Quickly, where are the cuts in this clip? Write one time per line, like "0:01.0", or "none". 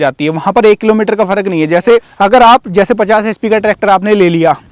0:02.1